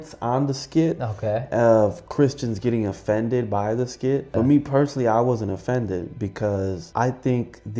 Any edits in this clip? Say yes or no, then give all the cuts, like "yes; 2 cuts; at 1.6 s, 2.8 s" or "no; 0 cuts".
yes; 2 cuts; at 4.3 s, 6.8 s